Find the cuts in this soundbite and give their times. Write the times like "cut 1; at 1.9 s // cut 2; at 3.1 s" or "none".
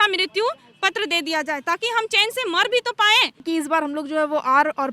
cut 1; at 3.4 s